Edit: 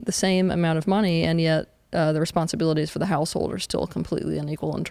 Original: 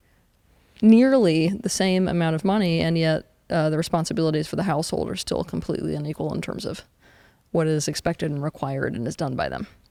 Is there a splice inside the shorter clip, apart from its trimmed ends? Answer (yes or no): no